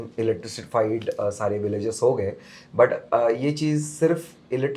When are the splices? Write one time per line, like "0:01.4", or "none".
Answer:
none